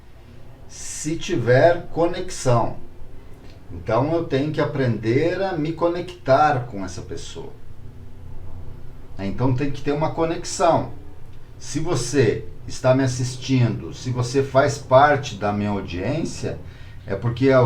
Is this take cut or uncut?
uncut